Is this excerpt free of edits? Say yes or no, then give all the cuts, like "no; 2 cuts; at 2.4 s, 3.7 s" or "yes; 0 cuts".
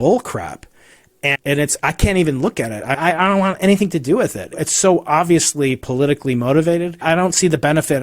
no; 4 cuts; at 1.3 s, 3.0 s, 4.6 s, 7.0 s